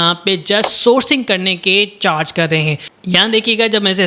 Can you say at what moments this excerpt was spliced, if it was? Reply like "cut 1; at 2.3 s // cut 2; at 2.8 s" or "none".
cut 1; at 2.9 s